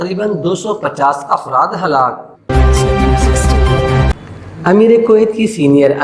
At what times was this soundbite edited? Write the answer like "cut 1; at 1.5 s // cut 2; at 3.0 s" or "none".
cut 1; at 2.4 s // cut 2; at 4.1 s

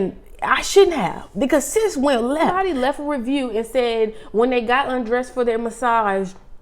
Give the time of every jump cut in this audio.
cut 1; at 2.5 s

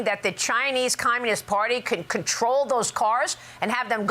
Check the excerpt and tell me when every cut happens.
none

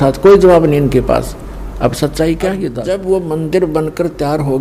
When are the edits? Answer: cut 1; at 2.7 s

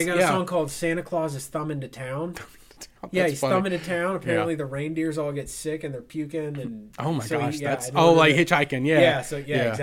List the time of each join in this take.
none

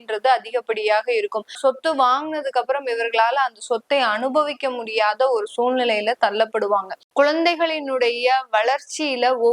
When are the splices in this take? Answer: cut 1; at 1.6 s // cut 2; at 7.0 s

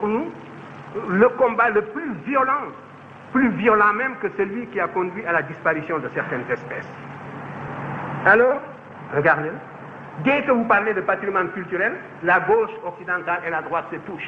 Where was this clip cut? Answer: cut 1; at 7.6 s

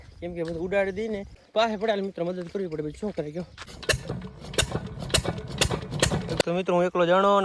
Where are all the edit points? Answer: cut 1; at 1.3 s // cut 2; at 3.6 s // cut 3; at 6.4 s

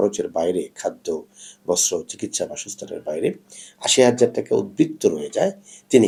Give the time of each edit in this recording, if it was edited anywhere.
none

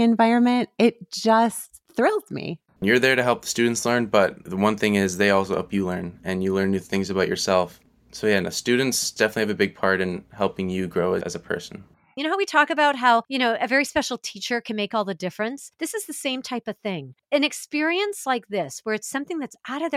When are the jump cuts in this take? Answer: cut 1; at 2.7 s // cut 2; at 4.4 s // cut 3; at 7.8 s // cut 4; at 9.1 s // cut 5; at 12.1 s

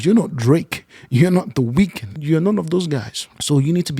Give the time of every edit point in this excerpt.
cut 1; at 2.1 s

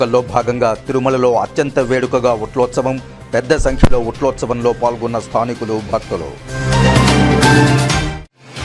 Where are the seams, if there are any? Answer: none

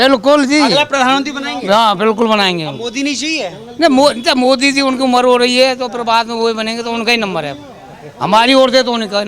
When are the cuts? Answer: none

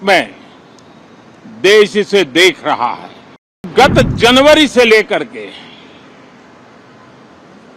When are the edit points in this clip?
cut 1; at 3.7 s

